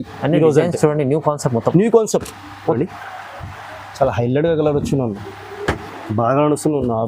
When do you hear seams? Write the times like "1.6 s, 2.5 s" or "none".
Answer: 2.8 s